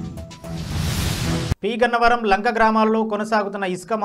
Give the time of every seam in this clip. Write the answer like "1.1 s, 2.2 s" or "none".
1.6 s